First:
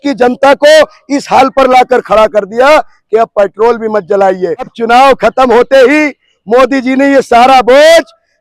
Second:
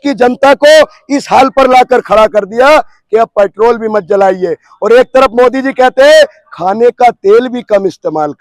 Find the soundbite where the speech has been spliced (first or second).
first